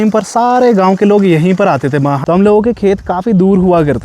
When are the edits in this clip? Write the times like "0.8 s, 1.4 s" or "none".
2.2 s